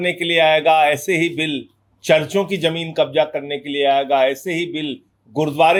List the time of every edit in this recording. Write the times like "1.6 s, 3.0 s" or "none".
none